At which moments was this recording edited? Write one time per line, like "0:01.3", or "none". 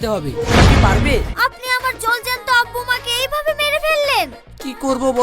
0:01.3